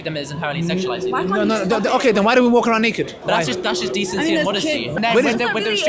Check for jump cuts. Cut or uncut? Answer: cut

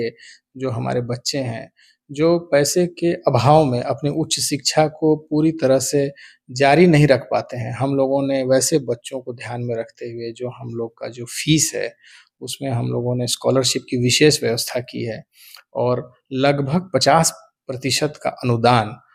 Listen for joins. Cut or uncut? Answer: uncut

